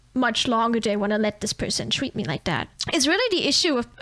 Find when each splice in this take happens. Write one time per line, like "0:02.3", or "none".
0:02.8